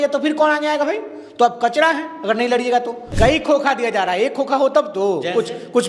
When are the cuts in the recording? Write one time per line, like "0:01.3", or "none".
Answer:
0:03.0